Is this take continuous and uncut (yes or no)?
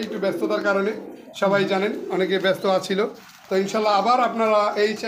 yes